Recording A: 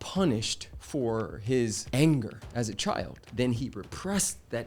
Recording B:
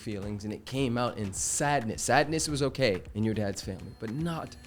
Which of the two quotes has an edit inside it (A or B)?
A